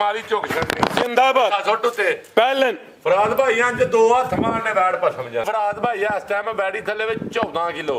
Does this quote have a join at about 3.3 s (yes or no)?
no